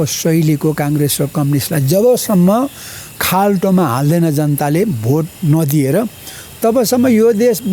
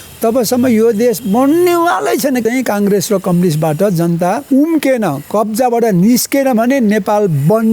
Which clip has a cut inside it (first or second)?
second